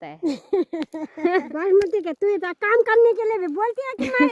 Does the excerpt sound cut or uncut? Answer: cut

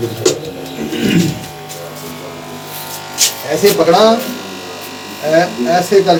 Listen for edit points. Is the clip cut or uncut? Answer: uncut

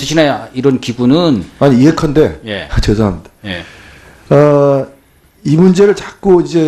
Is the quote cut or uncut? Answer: cut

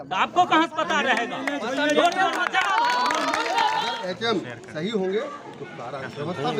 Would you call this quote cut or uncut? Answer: cut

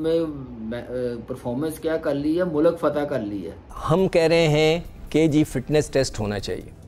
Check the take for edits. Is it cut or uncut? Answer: cut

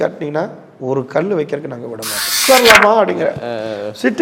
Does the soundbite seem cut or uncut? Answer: cut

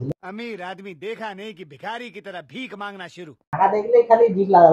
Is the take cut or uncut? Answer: cut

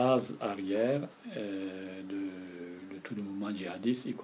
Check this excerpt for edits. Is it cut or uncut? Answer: uncut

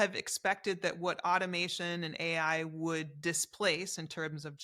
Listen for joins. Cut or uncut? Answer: uncut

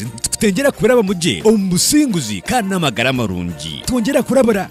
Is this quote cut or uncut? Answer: uncut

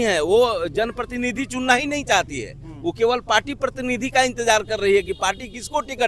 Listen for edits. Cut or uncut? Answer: uncut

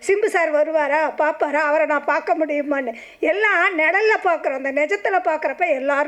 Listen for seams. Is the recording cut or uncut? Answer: uncut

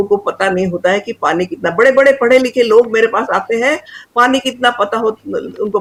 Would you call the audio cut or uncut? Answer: uncut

